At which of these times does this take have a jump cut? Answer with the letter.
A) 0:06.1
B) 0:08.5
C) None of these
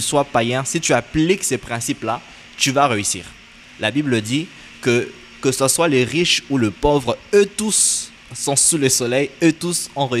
C